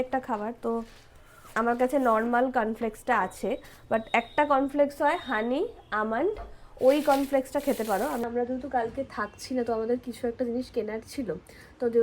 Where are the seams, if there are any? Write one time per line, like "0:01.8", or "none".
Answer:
0:08.2